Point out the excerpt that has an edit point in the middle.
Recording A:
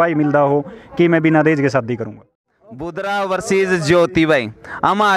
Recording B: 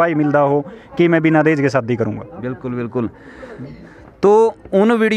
A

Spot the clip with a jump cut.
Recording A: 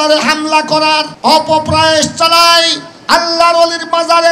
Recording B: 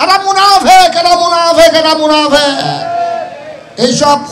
A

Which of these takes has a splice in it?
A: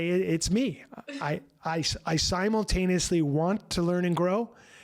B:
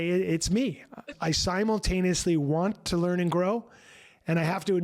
B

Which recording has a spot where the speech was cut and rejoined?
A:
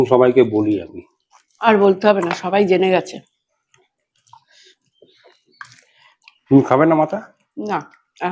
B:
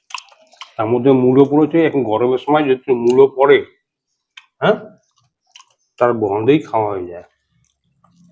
A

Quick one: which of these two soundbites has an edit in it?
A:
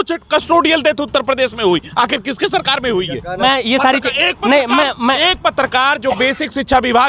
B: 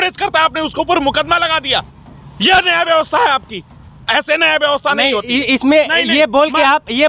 A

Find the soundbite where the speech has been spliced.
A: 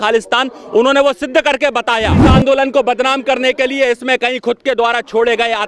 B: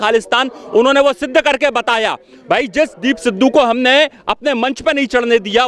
A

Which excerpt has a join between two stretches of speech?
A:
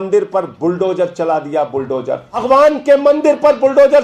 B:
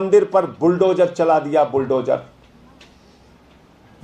A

